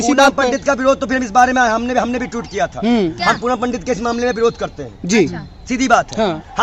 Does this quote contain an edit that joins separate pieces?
no; 0 cuts

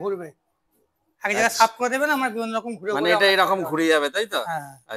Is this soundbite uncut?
yes; 0 cuts

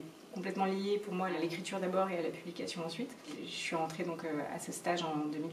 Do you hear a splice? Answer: yes; 2 cuts; at 1.3 s, 3.5 s

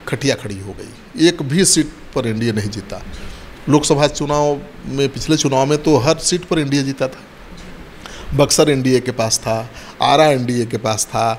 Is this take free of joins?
yes; 0 cuts

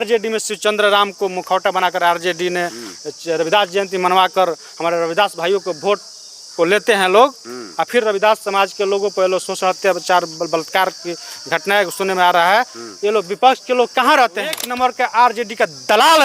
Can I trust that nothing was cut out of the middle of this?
no; 1 cut; at 14.6 s

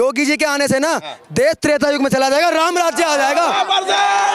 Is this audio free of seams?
yes; 0 cuts

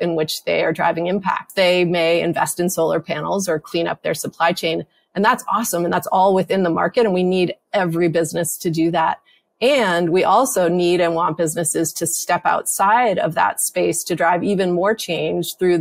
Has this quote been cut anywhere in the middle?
yes; 1 cut; at 1.5 s

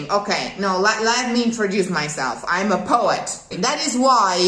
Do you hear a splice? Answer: yes; 1 cut; at 3.6 s

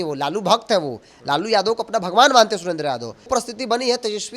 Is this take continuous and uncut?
no; 1 cut; at 3.3 s

